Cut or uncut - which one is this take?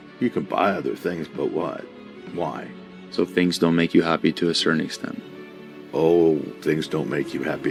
uncut